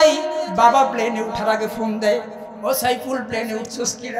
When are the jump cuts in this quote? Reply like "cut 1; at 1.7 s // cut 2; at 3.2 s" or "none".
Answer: none